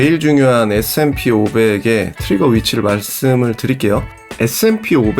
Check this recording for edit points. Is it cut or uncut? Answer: cut